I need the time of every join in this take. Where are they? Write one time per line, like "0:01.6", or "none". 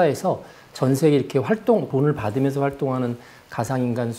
0:01.9